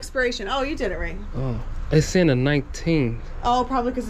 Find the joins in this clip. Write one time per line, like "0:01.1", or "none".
none